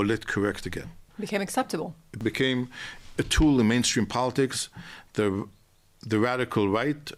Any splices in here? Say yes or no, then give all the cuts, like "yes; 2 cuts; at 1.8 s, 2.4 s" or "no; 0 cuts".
yes; 2 cuts; at 1.1 s, 2.1 s